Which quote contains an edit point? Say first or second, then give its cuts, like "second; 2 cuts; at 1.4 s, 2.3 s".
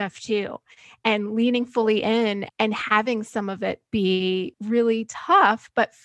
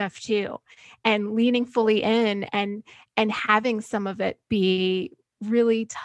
first; 2 cuts; at 2.4 s, 4.5 s